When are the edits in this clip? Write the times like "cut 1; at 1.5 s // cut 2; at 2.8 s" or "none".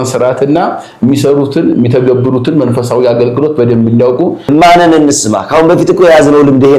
cut 1; at 4.4 s